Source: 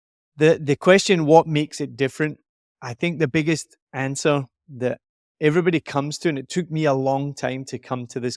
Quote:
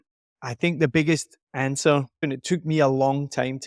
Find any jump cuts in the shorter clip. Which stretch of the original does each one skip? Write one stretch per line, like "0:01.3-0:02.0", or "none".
0:04.7-0:06.4